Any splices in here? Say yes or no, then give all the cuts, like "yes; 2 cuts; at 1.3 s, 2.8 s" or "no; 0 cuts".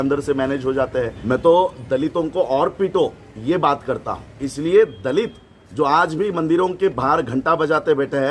yes; 2 cuts; at 1.2 s, 4.4 s